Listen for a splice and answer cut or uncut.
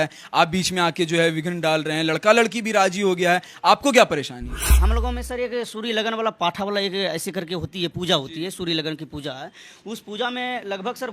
cut